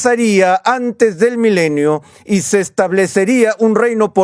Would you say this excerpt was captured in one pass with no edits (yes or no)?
yes